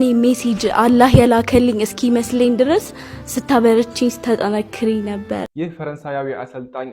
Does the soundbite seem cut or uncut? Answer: cut